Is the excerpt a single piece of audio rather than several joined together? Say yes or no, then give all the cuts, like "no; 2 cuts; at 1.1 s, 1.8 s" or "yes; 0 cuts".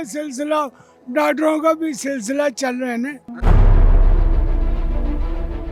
yes; 0 cuts